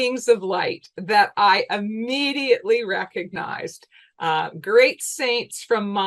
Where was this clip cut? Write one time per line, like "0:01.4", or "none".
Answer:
none

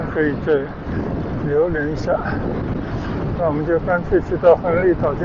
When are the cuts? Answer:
none

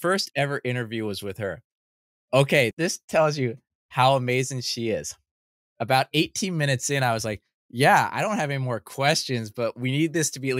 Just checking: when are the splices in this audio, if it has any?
0:02.7

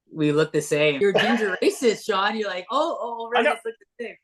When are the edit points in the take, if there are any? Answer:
0:01.0

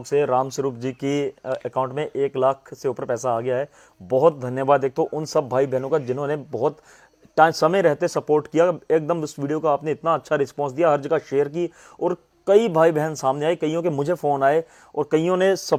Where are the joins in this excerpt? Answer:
none

